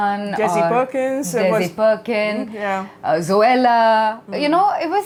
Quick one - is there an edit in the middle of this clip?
no; 0 cuts

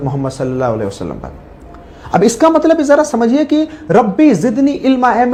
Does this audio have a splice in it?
no; 0 cuts

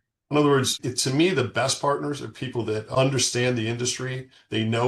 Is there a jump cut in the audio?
no; 0 cuts

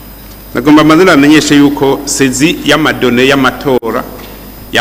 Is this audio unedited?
yes; 0 cuts

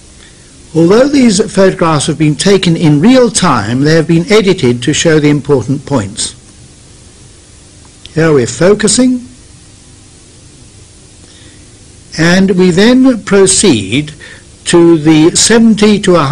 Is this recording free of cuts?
no; 1 cut; at 8.5 s

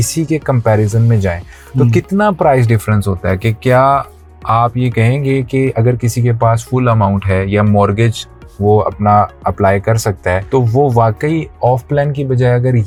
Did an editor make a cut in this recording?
no; 0 cuts

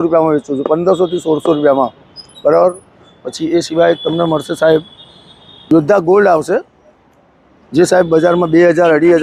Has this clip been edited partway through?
no; 0 cuts

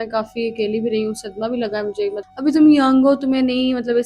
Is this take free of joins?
no; 1 cut; at 2.2 s

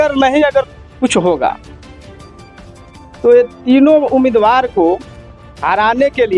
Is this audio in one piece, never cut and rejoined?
no; 2 cuts; at 1.6 s, 3.2 s

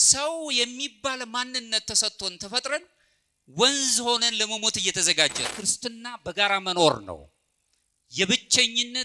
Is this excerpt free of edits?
no; 1 cut; at 5.5 s

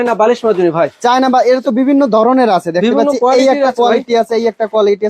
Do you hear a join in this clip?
no; 0 cuts

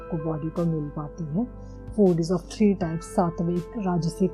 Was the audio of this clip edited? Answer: yes; 1 cut; at 1.8 s

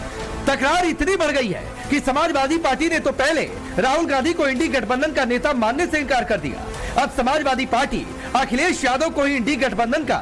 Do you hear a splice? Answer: no; 0 cuts

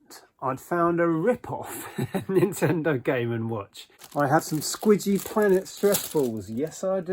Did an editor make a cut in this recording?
yes; 1 cut; at 4.0 s

